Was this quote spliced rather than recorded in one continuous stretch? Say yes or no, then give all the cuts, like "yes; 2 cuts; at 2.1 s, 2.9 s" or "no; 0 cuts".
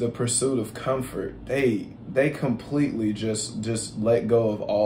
no; 0 cuts